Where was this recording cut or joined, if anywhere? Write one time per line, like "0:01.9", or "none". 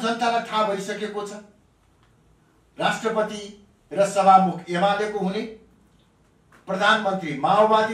none